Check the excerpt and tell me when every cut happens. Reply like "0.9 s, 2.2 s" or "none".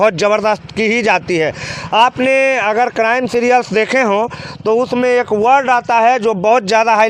none